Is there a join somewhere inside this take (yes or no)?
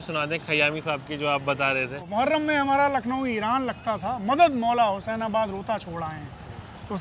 no